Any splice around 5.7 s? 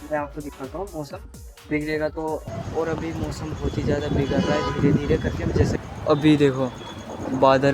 yes; 2 cuts; at 2.4 s, 5.7 s

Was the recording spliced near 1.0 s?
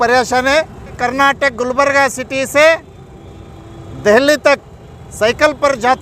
yes; 1 cut; at 1.0 s

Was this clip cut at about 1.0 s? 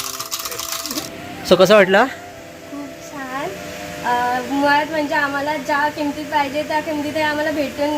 yes; 1 cut; at 1.0 s

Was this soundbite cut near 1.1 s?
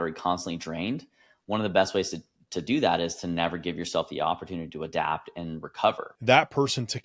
no; 1 cut; at 6.1 s

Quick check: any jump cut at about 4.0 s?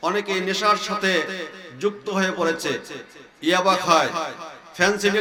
no; 0 cuts

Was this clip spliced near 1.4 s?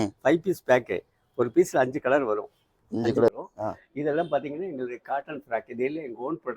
no; 1 cut; at 3.3 s

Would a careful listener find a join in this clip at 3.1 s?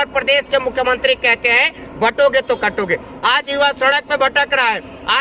yes; 1 cut; at 3.1 s

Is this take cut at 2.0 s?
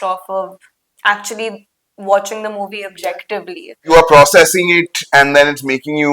no; 1 cut; at 3.8 s

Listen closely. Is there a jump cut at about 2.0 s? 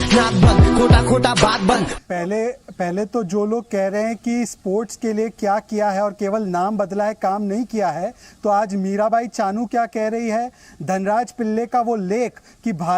yes; 1 cut; at 2.0 s

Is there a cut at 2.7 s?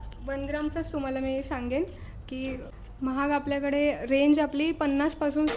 yes; 1 cut; at 2.7 s

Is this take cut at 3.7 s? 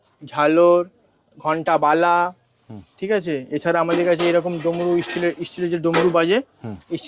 no; 0 cuts

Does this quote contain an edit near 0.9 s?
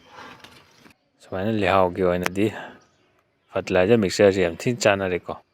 yes; 1 cut; at 0.9 s

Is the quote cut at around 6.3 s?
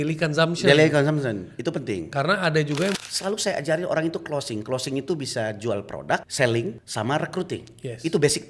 yes; 3 cuts; at 3.0 s, 6.3 s, 6.8 s

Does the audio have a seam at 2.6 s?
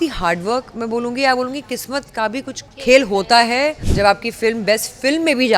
yes; 2 cuts; at 2.6 s, 3.8 s

